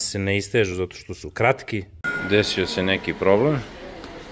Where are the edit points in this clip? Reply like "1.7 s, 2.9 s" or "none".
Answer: 2.0 s